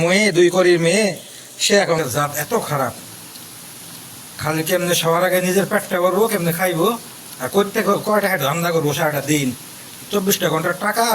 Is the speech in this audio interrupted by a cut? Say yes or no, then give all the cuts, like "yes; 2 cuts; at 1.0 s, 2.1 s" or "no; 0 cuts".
yes; 1 cut; at 2.0 s